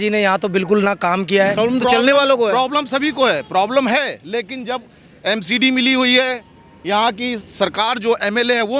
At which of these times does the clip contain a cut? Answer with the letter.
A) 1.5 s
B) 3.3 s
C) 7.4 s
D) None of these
A